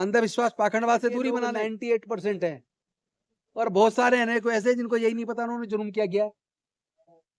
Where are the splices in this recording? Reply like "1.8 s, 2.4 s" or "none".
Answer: 1.4 s